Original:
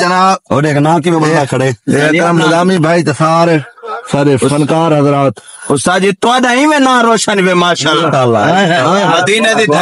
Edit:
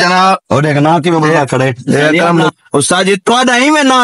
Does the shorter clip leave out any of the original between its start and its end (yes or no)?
yes